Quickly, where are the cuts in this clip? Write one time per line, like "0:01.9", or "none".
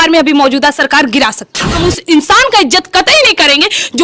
0:01.8